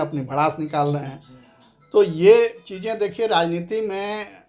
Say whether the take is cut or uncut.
uncut